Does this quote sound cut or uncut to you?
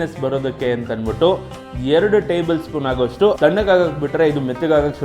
cut